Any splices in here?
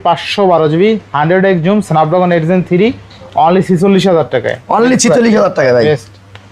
no; 0 cuts

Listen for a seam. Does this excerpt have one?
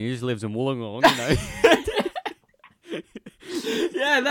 yes; 1 cut; at 1.0 s

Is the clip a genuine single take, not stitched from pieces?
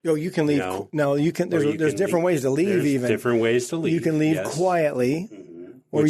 yes; 0 cuts

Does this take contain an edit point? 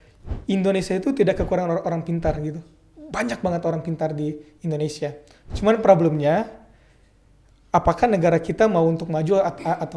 no; 0 cuts

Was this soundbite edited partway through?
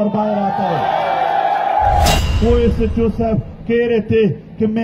yes; 1 cut; at 2.2 s

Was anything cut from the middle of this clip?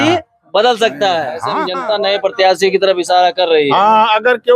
yes; 1 cut; at 1.6 s

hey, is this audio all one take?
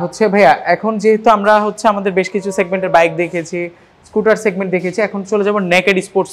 yes; 0 cuts

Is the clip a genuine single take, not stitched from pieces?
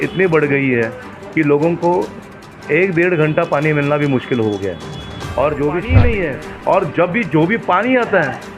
no; 1 cut; at 5.9 s

